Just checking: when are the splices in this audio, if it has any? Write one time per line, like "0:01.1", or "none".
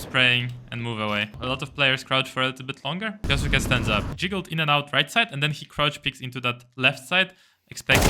0:01.3
0:03.2
0:04.1